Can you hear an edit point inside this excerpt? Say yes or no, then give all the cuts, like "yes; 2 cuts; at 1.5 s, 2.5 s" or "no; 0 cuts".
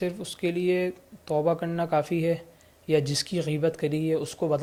no; 0 cuts